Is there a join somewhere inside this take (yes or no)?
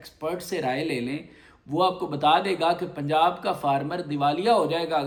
no